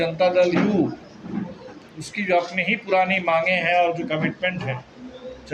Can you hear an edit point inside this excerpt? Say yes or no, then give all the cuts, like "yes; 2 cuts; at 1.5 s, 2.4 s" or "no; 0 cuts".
no; 0 cuts